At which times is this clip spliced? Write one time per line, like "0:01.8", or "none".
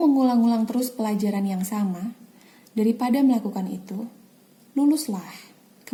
none